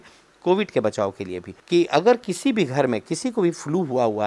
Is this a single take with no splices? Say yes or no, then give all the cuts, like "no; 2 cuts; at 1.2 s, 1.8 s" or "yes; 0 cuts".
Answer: no; 1 cut; at 1.5 s